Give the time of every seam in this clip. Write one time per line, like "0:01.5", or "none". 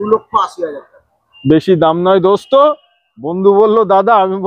none